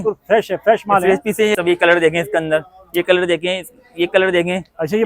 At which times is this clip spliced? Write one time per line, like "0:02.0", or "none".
0:01.6